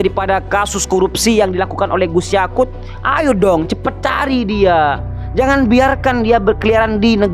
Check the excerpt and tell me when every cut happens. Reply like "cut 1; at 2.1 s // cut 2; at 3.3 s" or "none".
none